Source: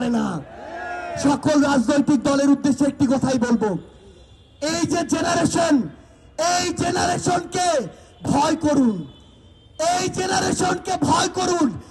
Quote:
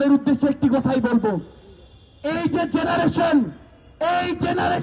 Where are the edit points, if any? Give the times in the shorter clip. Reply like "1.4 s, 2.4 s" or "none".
none